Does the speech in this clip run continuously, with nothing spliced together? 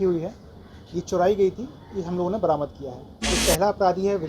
no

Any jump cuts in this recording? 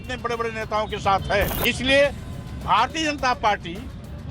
yes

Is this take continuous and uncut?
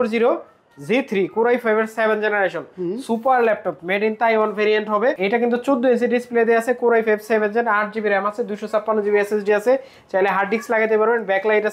no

